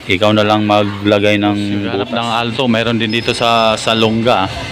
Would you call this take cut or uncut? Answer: cut